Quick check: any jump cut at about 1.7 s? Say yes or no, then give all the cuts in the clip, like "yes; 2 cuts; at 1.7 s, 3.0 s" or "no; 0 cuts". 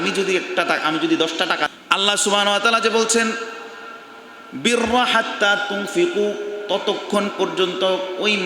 yes; 1 cut; at 1.7 s